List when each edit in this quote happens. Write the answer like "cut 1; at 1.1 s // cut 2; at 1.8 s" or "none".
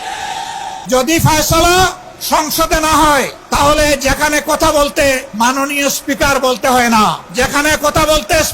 cut 1; at 0.8 s // cut 2; at 2.1 s // cut 3; at 3.4 s // cut 4; at 5.3 s // cut 5; at 7.2 s